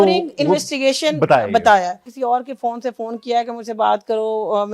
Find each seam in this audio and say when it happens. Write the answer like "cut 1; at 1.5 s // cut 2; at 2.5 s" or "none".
cut 1; at 2.1 s